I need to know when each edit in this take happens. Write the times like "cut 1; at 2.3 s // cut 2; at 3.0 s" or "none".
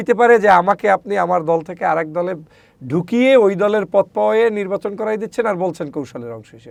none